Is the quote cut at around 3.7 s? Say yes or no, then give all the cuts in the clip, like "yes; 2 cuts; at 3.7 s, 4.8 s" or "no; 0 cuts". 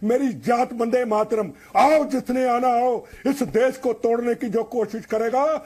no; 1 cut; at 1.6 s